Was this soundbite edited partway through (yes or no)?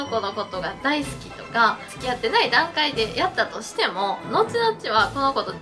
yes